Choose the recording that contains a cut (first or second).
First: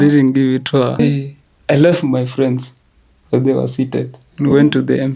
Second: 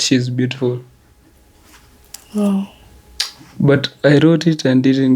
first